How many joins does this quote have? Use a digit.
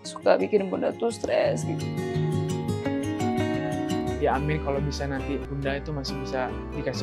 2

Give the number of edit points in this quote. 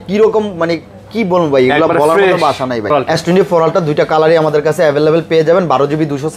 1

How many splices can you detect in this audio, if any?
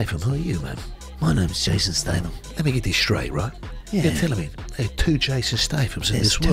1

